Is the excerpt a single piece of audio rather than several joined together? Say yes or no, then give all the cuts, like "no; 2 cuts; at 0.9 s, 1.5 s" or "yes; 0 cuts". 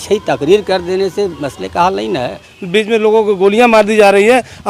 no; 1 cut; at 2.5 s